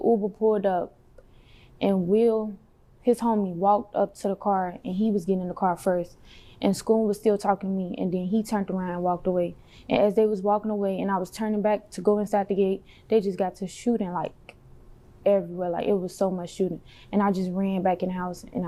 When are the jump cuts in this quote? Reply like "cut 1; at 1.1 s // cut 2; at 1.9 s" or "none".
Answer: none